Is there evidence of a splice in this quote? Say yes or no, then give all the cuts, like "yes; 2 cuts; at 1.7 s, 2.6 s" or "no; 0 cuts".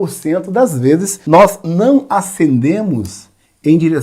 yes; 1 cut; at 1.1 s